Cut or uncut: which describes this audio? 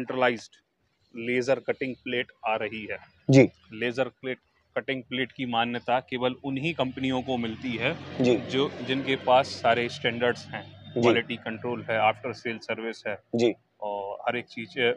uncut